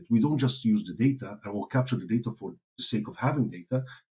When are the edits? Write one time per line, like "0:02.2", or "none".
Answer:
none

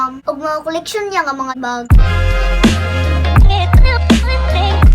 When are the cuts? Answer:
0:01.8

